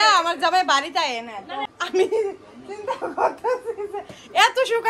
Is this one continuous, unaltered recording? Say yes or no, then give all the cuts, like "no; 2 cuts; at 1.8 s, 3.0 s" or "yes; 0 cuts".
no; 1 cut; at 1.5 s